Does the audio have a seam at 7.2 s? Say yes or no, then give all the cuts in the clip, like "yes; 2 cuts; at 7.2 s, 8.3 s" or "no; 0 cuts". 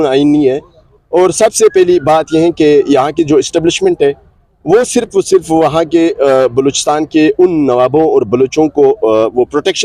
no; 0 cuts